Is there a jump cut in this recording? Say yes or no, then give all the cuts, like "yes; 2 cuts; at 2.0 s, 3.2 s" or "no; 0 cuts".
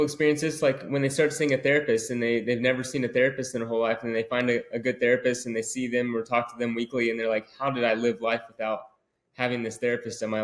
no; 0 cuts